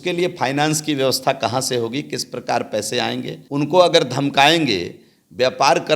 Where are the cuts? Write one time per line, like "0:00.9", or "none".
0:03.4